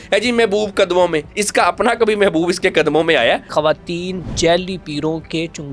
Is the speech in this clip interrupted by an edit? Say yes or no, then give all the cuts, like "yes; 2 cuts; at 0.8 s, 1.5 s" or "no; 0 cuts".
yes; 2 cuts; at 1.3 s, 3.5 s